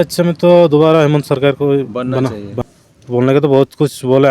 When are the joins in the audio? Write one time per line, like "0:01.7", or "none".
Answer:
0:02.6

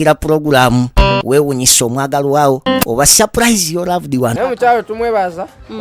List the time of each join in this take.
0:04.3

